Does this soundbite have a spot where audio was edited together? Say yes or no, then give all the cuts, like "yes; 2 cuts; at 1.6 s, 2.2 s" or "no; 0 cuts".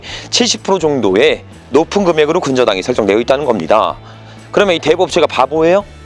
no; 0 cuts